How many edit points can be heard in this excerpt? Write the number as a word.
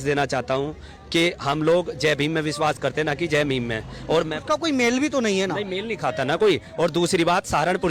zero